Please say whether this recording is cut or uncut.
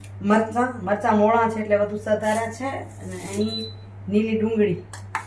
uncut